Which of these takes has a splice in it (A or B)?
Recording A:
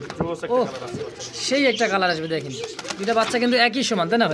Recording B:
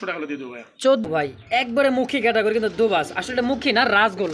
B